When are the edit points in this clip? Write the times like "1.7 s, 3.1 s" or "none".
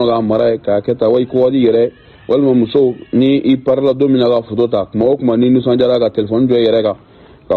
none